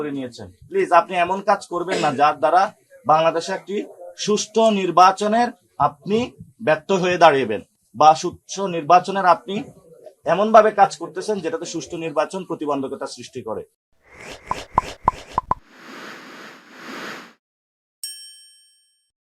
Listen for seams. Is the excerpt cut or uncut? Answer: uncut